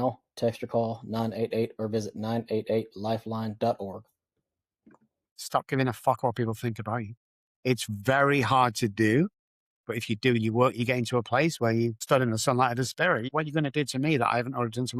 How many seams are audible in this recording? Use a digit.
3